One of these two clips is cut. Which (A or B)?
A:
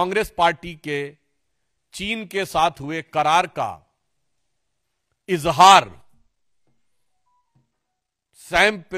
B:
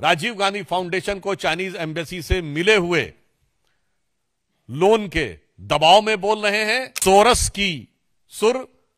B